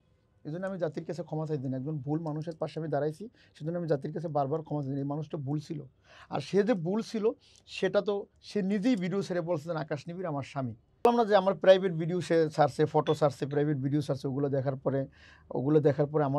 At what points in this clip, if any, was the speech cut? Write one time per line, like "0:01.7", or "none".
none